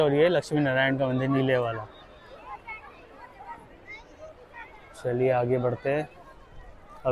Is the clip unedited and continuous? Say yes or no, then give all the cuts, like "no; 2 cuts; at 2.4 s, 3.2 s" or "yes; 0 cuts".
yes; 0 cuts